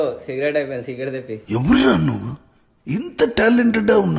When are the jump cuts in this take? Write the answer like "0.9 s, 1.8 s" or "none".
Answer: 1.3 s